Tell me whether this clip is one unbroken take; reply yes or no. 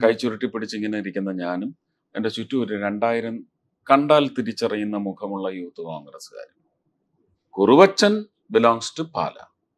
no